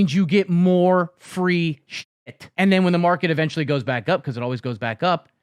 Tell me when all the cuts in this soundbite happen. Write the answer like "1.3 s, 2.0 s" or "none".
1.9 s